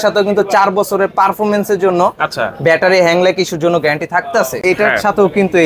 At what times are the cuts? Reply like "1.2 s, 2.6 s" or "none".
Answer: 4.6 s